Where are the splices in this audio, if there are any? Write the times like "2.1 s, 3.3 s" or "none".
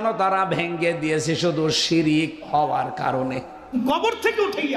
3.6 s